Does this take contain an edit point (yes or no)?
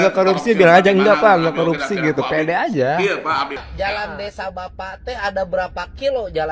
yes